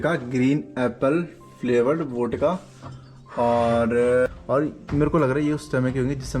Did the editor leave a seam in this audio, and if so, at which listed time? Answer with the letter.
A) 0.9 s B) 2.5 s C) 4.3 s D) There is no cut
C